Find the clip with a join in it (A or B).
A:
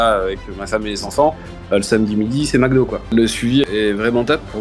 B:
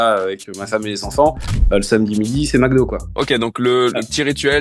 A